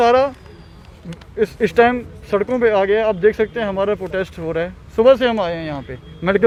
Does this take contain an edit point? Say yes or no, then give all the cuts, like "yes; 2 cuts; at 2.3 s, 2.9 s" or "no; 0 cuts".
no; 0 cuts